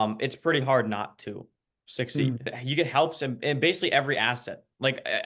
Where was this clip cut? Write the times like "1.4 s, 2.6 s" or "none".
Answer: 2.5 s

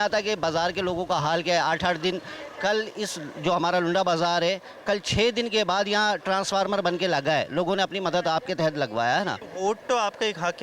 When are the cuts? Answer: 9.5 s

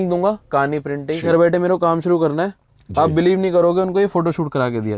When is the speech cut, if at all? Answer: 1.2 s

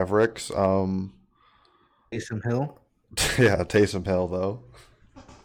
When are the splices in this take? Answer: none

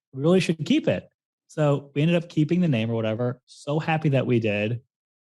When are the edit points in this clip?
3.2 s

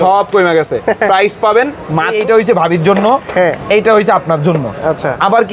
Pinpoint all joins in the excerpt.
2.1 s

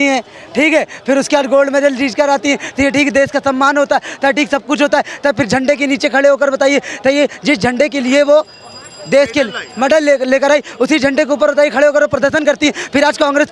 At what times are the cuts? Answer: none

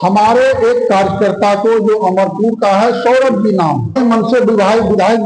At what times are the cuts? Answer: 4.0 s

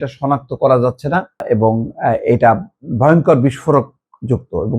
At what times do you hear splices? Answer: 1.4 s

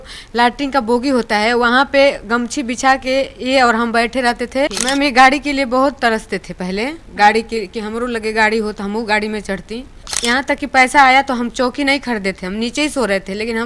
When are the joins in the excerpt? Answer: 4.8 s, 10.1 s

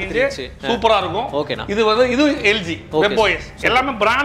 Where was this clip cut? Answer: none

